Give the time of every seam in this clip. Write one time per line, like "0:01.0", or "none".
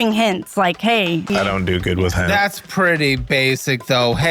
0:01.3
0:02.3